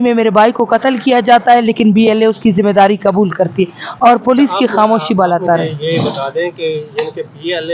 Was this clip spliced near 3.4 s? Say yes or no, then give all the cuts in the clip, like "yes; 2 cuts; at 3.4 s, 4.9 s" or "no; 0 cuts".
no; 0 cuts